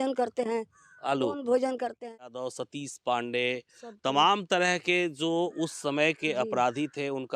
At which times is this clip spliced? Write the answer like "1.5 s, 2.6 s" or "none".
2.0 s